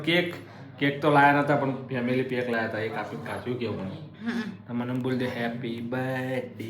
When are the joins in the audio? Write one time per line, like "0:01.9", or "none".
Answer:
none